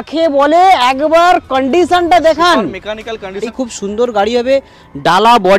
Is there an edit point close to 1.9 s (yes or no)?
no